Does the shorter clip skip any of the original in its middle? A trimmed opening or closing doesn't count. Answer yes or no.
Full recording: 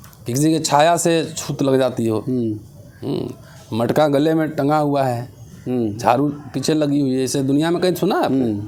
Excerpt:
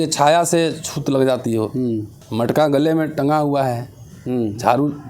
yes